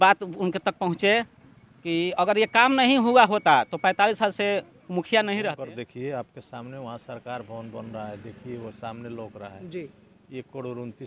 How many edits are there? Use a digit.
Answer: 1